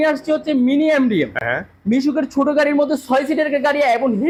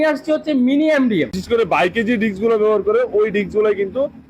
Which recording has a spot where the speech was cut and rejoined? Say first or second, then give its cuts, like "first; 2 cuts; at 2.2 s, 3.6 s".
second; 1 cut; at 1.4 s